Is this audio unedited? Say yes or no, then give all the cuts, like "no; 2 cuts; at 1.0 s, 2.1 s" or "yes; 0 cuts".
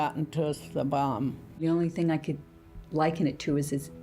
no; 1 cut; at 1.6 s